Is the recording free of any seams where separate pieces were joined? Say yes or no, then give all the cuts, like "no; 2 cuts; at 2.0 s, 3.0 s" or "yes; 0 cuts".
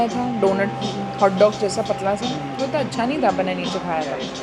yes; 0 cuts